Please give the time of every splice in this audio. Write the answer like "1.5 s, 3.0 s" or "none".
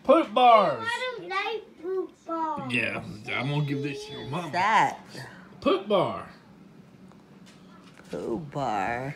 0.9 s

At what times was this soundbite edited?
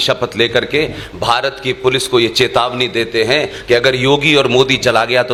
none

